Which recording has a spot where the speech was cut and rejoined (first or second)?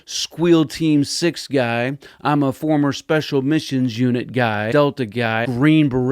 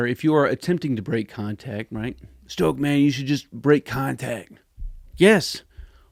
first